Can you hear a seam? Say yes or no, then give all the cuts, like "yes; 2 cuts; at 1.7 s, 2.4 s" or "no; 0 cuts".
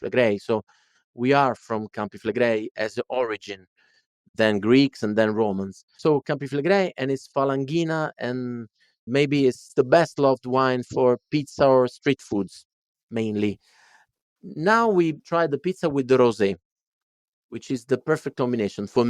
yes; 2 cuts; at 9.6 s, 15.2 s